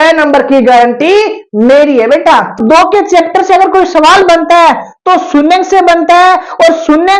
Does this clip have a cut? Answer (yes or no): yes